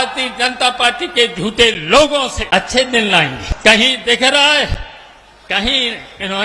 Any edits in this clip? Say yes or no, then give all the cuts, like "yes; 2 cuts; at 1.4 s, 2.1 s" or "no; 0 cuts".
yes; 2 cuts; at 2.4 s, 3.4 s